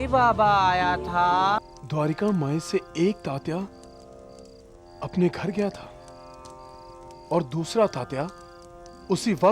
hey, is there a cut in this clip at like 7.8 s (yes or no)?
no